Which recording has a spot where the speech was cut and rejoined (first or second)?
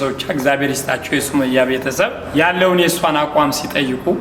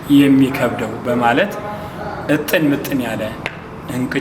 first